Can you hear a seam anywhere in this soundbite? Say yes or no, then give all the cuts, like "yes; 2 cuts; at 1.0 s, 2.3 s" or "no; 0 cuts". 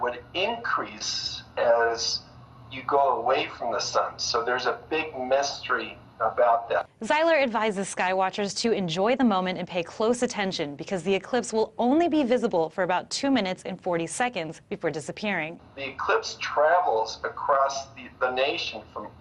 yes; 1 cut; at 12.9 s